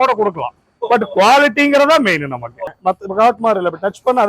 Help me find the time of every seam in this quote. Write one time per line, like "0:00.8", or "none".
0:02.7